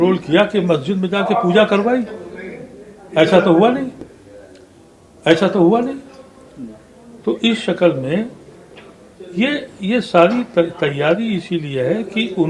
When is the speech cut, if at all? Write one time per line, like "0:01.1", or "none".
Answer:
none